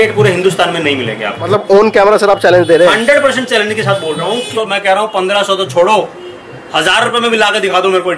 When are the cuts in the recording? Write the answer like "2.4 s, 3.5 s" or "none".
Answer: 1.5 s, 4.5 s

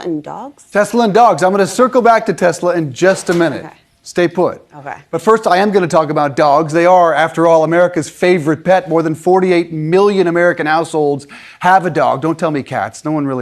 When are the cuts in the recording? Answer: none

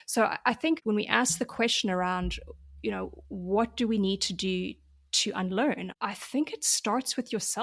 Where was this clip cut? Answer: 1.0 s, 5.9 s

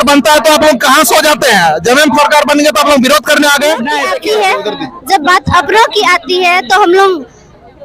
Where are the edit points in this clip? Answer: 4.1 s

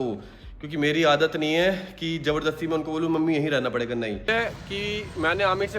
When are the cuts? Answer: 4.3 s

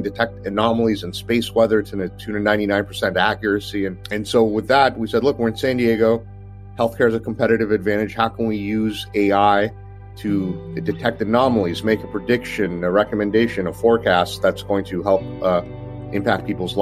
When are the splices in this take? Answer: none

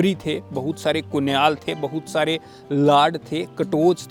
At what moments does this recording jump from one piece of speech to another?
none

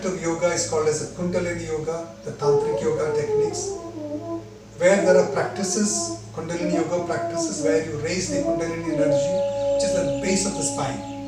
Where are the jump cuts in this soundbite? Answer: none

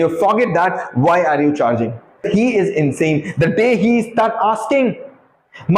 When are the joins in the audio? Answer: 2.2 s

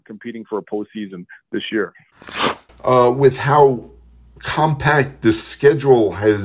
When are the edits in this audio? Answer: 2.2 s

